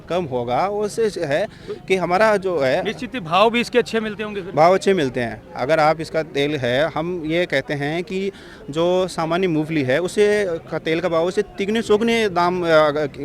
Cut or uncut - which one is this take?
uncut